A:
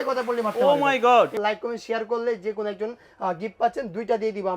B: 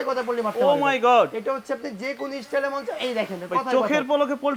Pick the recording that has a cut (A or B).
A